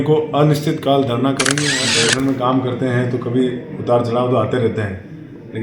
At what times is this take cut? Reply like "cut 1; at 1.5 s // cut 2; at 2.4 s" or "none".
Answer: cut 1; at 1.9 s